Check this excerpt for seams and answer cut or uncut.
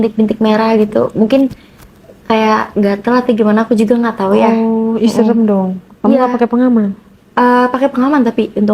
uncut